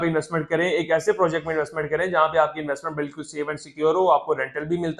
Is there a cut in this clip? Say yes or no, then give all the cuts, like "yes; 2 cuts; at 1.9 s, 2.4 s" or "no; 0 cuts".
no; 0 cuts